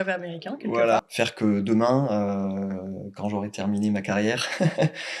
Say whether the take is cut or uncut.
cut